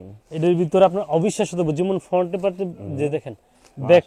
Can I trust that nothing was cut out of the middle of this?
yes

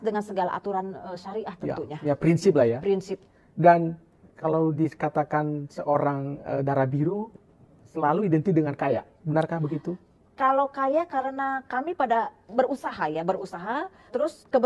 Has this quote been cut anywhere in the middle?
no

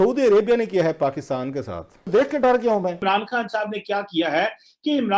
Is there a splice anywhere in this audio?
yes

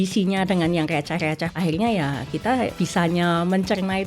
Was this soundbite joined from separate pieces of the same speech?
yes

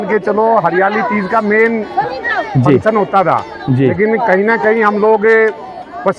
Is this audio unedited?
yes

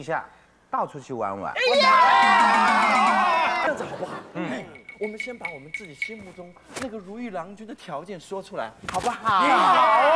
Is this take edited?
yes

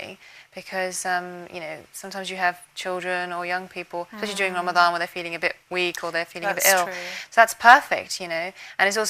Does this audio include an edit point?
yes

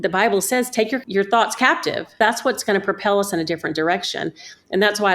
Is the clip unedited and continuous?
no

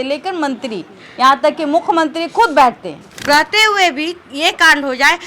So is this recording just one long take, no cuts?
no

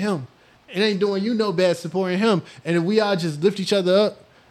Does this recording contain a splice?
no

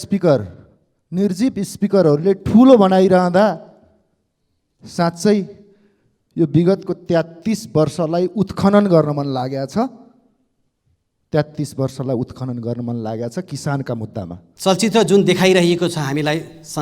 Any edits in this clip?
yes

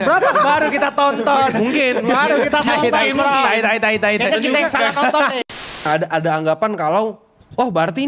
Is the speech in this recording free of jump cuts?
no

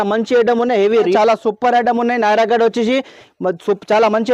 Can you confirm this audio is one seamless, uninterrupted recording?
no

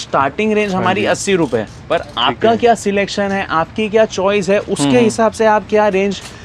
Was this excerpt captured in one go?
yes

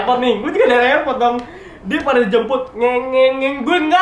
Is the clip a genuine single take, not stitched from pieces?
yes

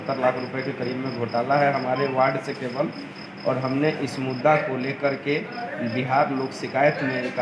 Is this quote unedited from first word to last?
yes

